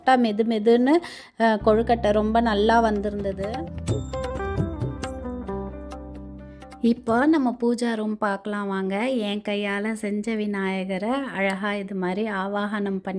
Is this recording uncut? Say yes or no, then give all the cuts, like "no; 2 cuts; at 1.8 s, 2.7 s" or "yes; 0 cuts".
no; 1 cut; at 3.4 s